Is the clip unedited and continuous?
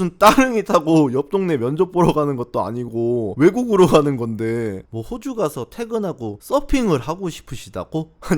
no; 2 cuts; at 3.3 s, 4.8 s

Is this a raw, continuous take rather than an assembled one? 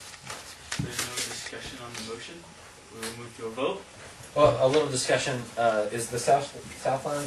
yes; 0 cuts

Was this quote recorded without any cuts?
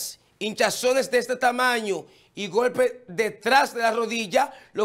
yes; 0 cuts

